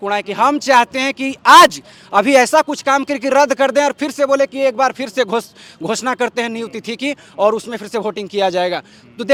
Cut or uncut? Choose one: uncut